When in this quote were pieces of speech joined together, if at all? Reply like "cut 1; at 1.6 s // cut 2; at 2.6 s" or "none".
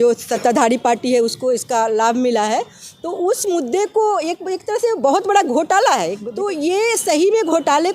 cut 1; at 6.2 s

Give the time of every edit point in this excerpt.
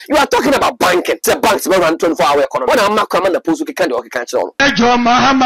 cut 1; at 1.2 s // cut 2; at 2.6 s // cut 3; at 4.5 s

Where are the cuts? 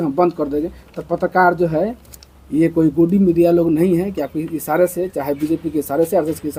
none

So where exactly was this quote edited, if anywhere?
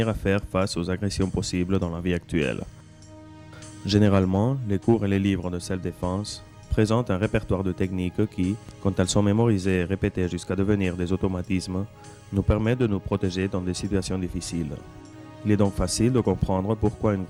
none

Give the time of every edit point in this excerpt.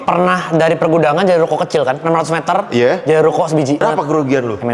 cut 1; at 2.0 s // cut 2; at 3.8 s

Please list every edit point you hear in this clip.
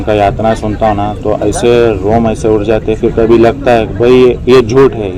none

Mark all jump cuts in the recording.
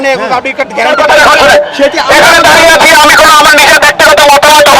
cut 1; at 0.9 s

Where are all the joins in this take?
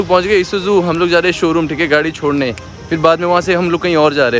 none

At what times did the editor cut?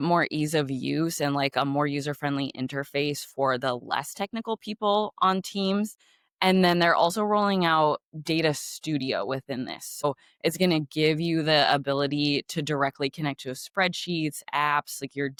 none

